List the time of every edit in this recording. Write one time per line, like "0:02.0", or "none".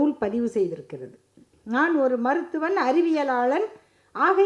0:01.5